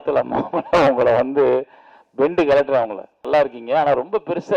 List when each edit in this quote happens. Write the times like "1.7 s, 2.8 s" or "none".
3.3 s